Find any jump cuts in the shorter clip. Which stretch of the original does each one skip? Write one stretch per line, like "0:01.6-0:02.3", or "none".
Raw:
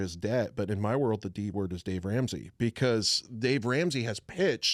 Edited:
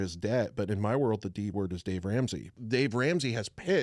0:02.5-0:03.2